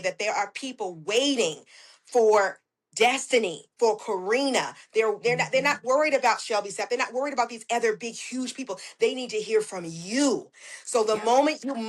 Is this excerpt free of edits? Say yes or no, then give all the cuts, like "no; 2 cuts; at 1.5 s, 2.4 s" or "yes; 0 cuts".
yes; 0 cuts